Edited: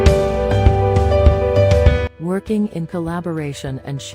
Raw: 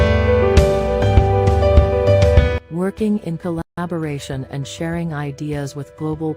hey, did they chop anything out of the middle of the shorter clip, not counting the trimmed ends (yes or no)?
yes